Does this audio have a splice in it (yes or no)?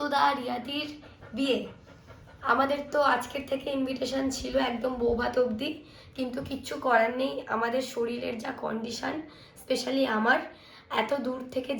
no